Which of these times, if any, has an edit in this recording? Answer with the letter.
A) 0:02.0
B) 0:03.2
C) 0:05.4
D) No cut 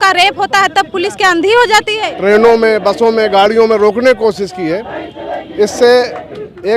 A